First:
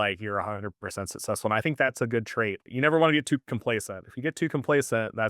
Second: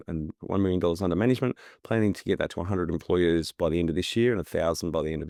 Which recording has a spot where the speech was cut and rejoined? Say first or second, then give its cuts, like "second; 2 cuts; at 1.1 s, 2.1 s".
first; 1 cut; at 2.7 s